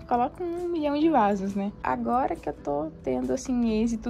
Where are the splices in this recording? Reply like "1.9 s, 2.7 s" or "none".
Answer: 1.8 s